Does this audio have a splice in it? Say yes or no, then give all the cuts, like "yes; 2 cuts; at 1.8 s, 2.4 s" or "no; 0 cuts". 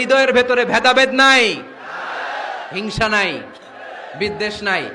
no; 0 cuts